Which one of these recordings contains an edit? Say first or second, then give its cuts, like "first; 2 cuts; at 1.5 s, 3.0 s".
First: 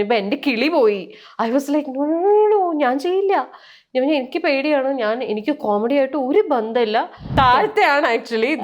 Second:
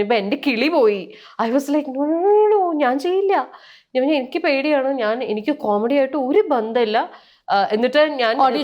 first; 1 cut; at 7.3 s